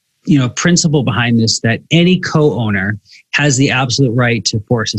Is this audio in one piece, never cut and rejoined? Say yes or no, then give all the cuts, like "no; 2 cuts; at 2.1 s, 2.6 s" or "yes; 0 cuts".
yes; 0 cuts